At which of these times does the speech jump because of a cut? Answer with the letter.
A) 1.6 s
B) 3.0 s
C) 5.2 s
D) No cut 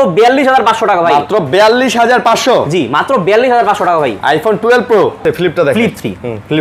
C